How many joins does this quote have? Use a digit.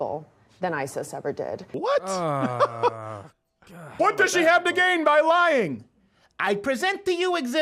2